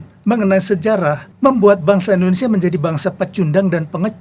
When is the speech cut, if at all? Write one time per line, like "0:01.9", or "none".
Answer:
0:01.3